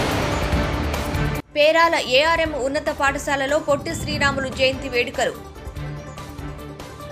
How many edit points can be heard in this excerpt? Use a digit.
1